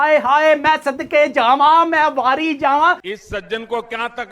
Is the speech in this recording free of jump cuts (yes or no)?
yes